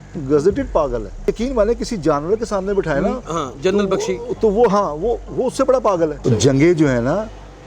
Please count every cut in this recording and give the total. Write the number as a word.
two